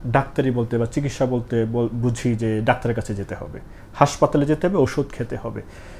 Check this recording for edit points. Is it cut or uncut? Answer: uncut